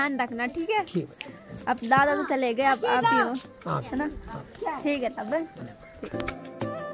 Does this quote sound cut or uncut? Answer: uncut